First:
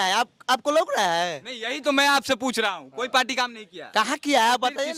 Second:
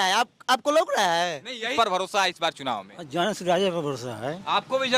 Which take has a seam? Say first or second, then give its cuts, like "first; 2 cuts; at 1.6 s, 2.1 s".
second; 1 cut; at 1.7 s